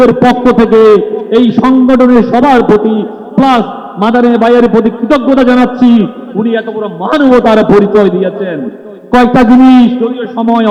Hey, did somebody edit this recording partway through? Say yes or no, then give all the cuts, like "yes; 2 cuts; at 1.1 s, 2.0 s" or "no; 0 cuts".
no; 0 cuts